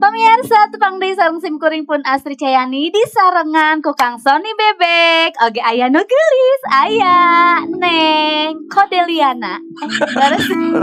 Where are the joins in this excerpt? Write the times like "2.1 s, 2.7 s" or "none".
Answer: none